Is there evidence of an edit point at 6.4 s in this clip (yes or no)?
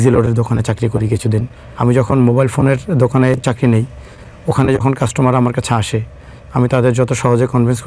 no